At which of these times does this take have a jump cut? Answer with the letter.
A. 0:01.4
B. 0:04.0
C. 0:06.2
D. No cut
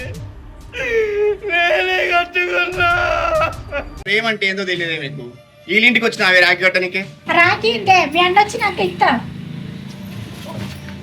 B